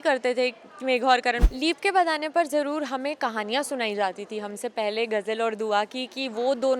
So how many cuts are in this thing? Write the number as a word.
one